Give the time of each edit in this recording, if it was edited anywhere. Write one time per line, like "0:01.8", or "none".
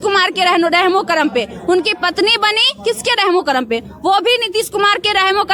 none